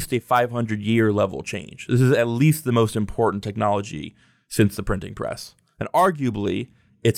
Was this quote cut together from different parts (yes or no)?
no